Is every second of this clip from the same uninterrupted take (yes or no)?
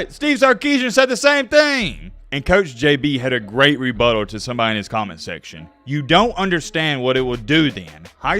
no